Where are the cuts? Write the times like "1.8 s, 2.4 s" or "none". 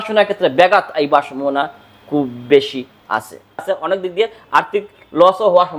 3.6 s